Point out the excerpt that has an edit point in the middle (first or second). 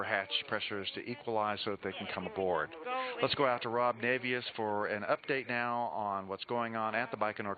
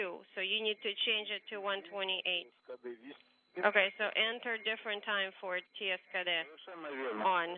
first